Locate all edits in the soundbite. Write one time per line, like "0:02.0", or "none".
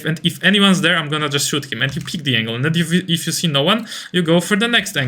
none